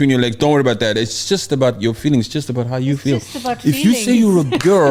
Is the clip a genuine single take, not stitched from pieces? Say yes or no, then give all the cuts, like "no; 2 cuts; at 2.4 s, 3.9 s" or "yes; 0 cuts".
yes; 0 cuts